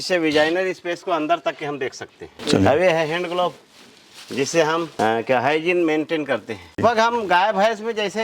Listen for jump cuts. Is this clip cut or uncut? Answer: uncut